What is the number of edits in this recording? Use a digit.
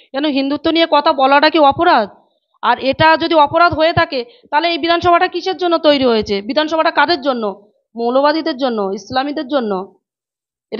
0